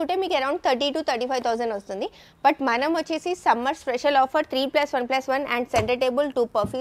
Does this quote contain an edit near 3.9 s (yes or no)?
no